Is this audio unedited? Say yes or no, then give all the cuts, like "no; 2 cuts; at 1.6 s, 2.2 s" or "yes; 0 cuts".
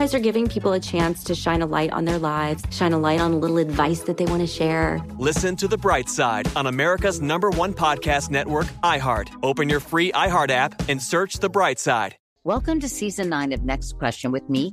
no; 1 cut; at 12.2 s